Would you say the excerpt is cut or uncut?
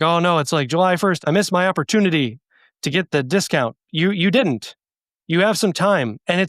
cut